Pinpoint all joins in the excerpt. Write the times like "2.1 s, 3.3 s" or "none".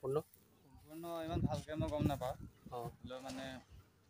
none